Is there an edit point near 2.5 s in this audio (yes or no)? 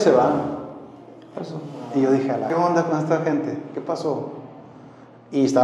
yes